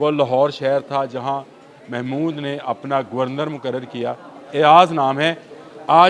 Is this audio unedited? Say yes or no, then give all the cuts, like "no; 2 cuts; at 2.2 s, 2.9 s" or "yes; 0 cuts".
yes; 0 cuts